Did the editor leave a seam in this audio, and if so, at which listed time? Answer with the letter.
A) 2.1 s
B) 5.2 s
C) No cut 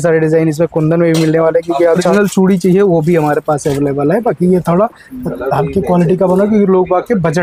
A